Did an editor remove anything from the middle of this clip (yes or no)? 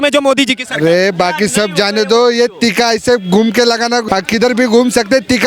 yes